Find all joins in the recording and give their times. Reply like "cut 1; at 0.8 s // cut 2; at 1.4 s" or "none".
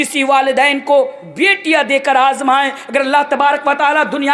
none